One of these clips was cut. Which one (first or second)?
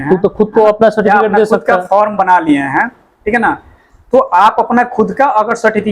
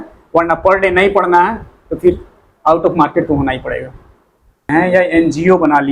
second